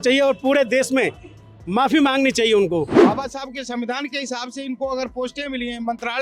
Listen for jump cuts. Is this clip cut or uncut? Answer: cut